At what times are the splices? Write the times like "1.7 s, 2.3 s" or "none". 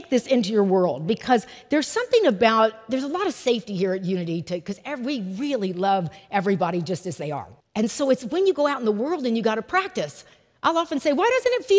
7.5 s

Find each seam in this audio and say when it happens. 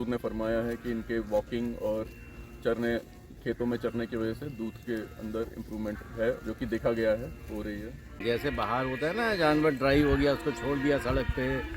8.2 s

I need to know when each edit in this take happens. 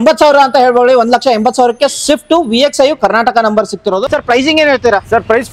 4.0 s

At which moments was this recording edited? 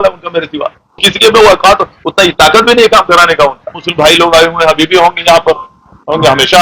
1.1 s, 3.7 s

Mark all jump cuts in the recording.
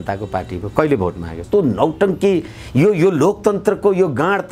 1.4 s

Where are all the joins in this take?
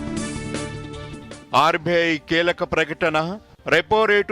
1.1 s

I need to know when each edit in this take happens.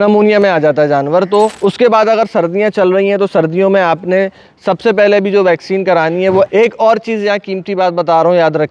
1.5 s, 6.5 s

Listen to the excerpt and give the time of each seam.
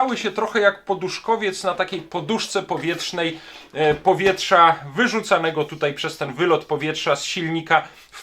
none

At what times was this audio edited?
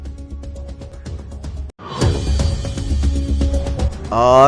0.9 s

